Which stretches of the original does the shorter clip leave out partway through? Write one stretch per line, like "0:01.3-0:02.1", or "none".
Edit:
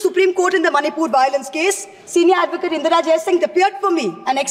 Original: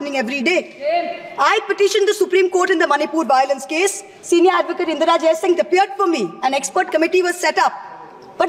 none